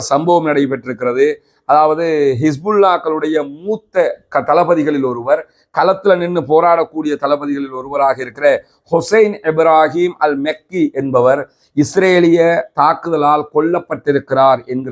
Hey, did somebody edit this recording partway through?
no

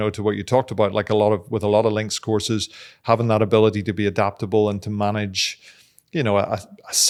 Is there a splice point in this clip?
no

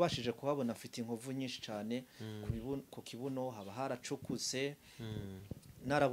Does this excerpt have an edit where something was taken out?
no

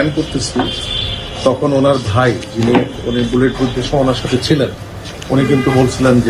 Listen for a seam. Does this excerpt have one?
no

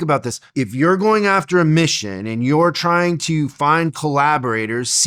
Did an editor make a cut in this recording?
no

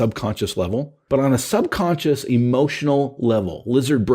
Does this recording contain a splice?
yes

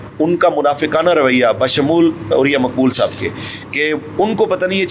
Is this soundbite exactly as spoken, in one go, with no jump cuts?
yes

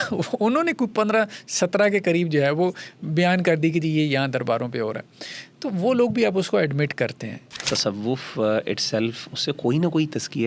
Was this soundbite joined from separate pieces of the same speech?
yes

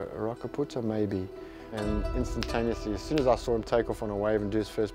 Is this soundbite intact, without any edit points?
no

